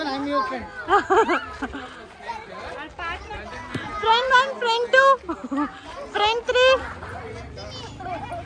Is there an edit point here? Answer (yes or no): no